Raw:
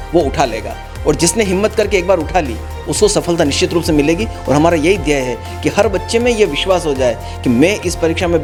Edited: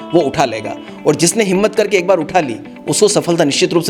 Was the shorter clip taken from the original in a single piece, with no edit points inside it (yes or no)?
yes